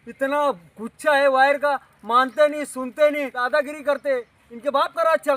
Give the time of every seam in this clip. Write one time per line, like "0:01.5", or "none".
0:03.4